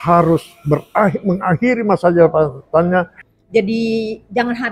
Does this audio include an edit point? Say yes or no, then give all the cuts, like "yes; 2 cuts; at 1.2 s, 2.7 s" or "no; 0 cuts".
yes; 1 cut; at 3.2 s